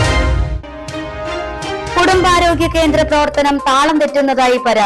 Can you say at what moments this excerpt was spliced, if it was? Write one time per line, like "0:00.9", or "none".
0:01.8